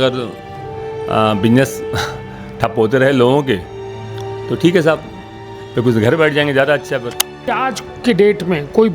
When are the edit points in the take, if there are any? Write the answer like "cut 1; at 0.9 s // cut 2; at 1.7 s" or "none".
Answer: cut 1; at 7.6 s